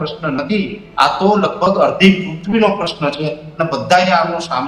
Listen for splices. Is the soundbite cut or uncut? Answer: uncut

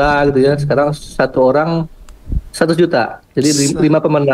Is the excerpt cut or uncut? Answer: uncut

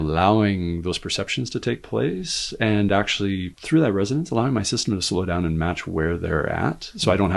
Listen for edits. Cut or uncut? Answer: uncut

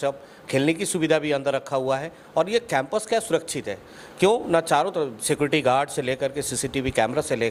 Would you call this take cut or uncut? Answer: uncut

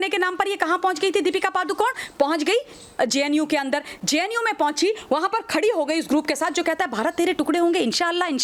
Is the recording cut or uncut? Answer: uncut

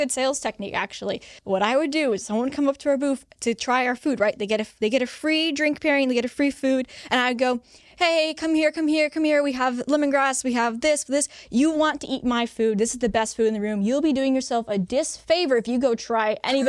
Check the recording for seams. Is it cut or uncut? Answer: cut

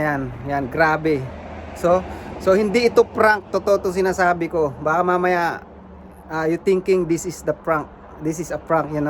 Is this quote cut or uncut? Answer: uncut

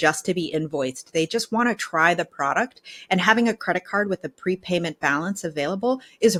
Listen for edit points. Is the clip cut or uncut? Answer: uncut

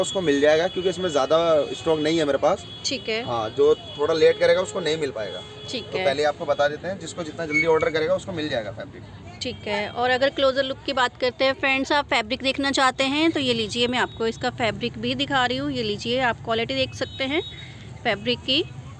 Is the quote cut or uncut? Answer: uncut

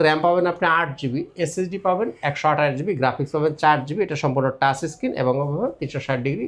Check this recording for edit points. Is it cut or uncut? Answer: uncut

